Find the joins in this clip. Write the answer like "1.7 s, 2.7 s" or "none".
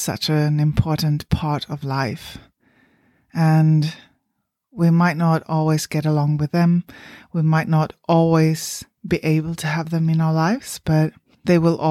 none